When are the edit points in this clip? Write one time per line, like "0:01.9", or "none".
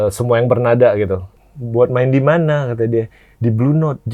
0:01.3